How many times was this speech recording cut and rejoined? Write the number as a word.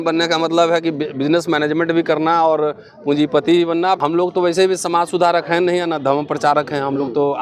one